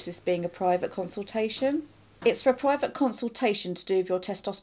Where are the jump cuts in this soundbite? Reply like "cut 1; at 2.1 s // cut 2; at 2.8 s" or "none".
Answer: cut 1; at 1.7 s